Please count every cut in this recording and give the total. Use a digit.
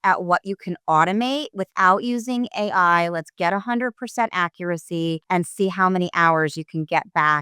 1